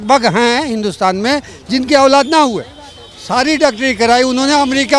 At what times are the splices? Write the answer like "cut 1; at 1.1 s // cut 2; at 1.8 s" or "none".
none